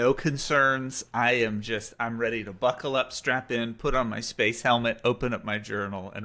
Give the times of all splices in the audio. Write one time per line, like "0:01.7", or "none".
none